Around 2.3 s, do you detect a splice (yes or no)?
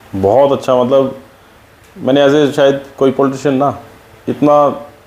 no